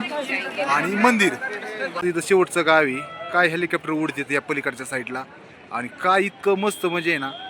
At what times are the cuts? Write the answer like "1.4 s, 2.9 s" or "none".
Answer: 2.0 s

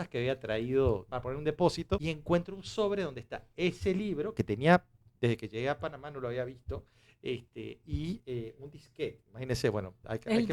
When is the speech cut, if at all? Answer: 1.1 s, 2.1 s

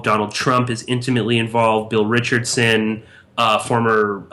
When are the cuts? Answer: none

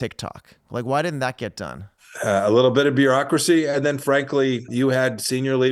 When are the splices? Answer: 2.0 s, 4.7 s

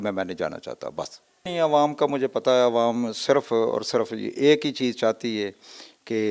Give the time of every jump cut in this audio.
1.5 s

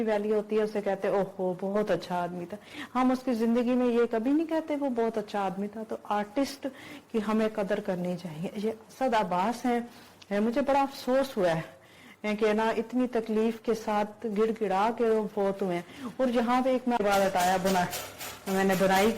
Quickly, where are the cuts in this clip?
17.0 s

